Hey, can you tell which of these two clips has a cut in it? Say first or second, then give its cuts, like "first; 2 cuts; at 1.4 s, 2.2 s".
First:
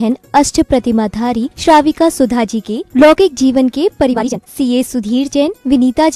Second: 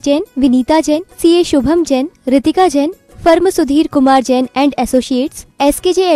first; 1 cut; at 4.2 s